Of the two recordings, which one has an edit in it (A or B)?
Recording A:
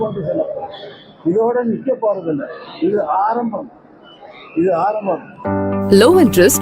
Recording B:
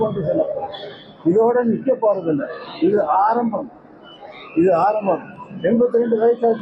A